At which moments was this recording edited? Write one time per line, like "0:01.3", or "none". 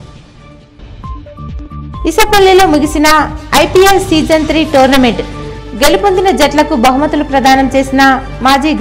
none